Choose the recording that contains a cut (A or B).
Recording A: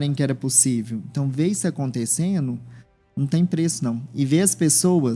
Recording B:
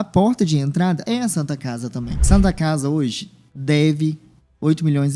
B